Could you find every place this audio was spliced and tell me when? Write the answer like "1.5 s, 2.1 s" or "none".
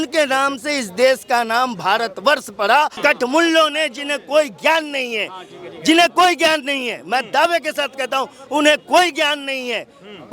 2.9 s